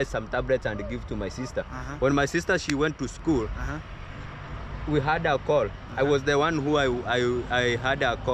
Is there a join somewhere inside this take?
no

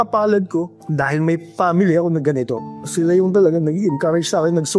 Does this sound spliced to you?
no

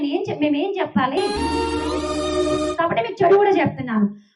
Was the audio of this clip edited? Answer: yes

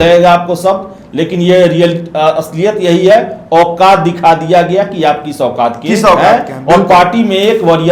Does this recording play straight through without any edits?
yes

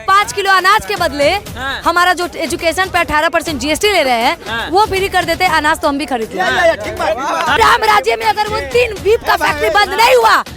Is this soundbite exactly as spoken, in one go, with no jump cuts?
no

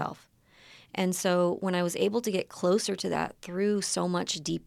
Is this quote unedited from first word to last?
yes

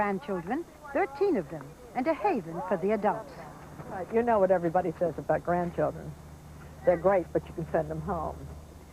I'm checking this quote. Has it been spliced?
yes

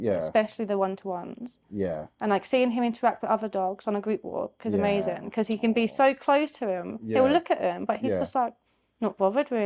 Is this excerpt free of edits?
yes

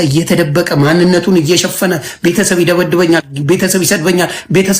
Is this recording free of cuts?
yes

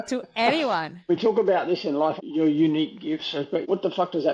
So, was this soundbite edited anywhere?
yes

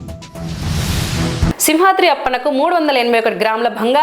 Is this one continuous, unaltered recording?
yes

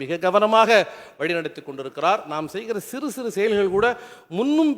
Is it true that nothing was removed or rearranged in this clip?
yes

